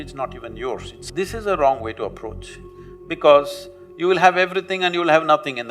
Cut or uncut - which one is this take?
cut